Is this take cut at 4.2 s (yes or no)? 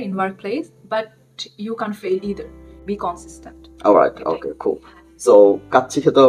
no